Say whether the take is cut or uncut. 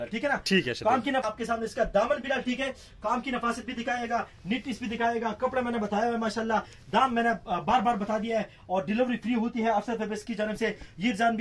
cut